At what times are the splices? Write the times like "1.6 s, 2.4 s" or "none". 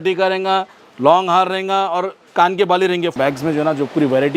3.1 s